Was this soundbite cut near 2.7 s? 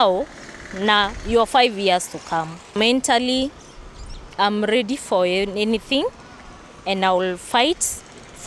yes; 1 cut; at 2.7 s

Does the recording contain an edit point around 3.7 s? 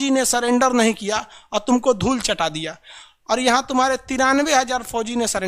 no; 0 cuts

